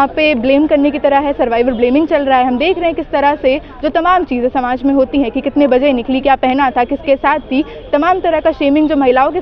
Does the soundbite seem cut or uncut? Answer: uncut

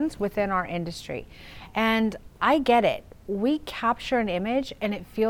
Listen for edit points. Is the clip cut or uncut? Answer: uncut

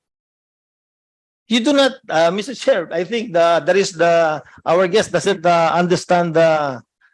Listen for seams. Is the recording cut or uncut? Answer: uncut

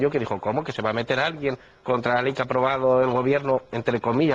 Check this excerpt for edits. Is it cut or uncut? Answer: uncut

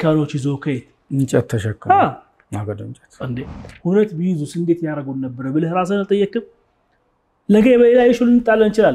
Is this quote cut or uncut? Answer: cut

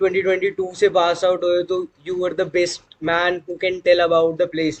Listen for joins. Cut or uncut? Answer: uncut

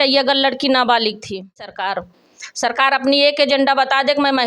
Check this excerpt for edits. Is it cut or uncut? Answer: cut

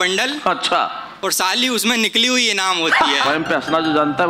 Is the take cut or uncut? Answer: cut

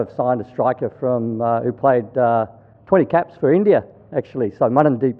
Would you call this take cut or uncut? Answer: uncut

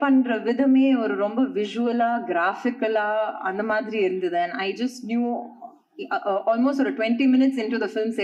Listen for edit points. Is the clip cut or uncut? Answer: uncut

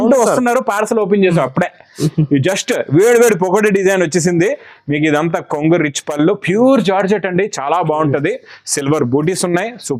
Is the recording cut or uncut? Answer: uncut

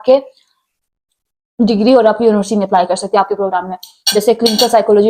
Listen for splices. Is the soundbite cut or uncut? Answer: uncut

